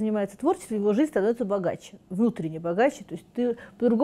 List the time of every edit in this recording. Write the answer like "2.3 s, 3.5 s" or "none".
none

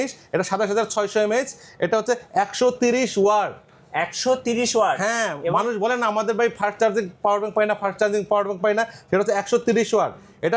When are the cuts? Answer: none

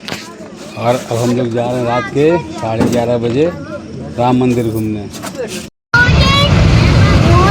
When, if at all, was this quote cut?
5.8 s

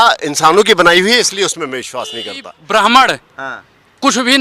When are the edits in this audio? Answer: 2.5 s

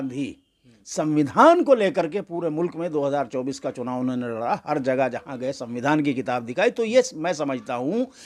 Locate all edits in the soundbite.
none

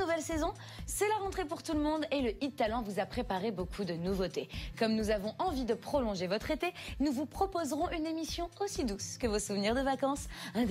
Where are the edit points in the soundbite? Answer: none

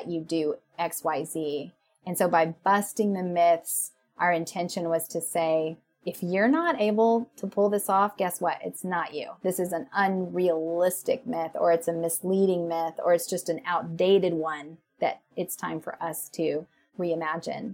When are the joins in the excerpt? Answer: 16.8 s

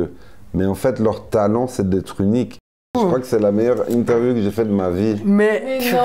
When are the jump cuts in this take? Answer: 2.9 s

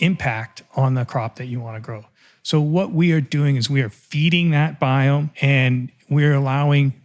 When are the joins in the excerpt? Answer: 5.3 s

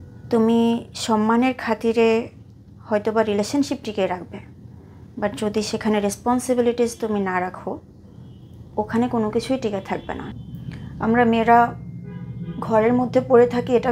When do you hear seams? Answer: 10.3 s

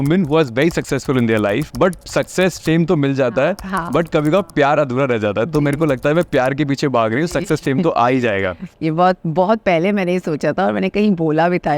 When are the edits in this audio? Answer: 1.7 s

